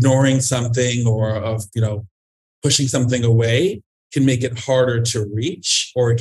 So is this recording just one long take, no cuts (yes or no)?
yes